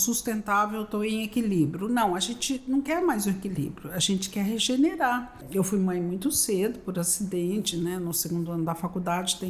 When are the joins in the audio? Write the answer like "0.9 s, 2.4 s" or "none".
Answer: 5.4 s